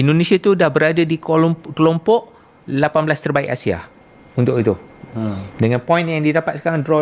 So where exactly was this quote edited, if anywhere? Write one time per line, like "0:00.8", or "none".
none